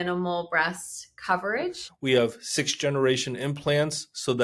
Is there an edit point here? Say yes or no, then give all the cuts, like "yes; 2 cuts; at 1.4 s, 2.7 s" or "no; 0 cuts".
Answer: yes; 1 cut; at 2.0 s